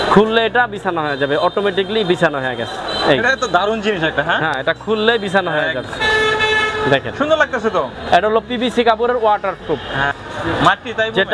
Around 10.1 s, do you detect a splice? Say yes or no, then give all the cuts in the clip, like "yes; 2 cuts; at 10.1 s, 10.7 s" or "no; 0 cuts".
yes; 2 cuts; at 5.9 s, 10.1 s